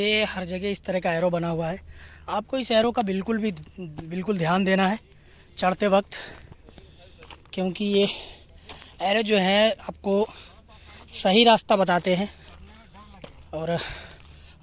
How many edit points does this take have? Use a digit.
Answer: 0